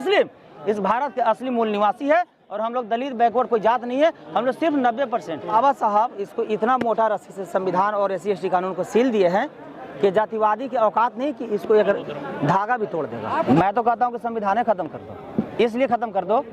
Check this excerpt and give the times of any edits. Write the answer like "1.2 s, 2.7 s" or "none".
5.5 s, 13.5 s